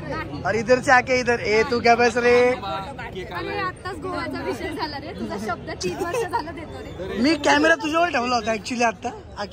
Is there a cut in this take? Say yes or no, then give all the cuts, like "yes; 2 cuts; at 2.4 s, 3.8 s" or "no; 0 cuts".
no; 0 cuts